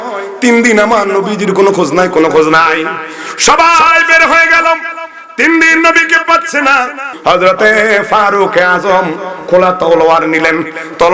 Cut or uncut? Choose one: cut